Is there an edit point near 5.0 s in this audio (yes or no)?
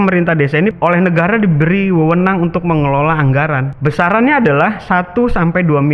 no